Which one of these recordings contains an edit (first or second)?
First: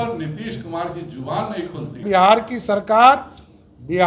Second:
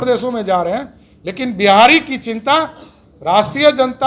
first